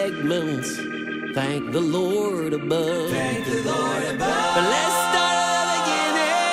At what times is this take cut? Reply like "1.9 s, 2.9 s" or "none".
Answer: none